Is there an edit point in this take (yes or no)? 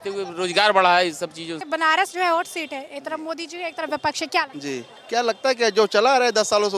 yes